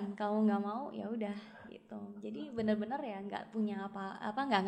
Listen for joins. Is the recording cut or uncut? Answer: uncut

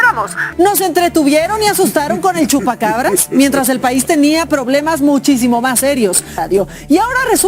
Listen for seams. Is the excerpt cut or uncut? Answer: cut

